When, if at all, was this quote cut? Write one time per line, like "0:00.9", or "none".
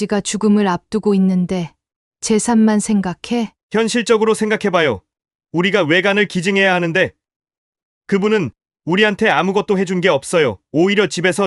none